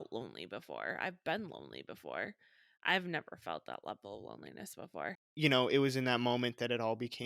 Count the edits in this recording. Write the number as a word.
one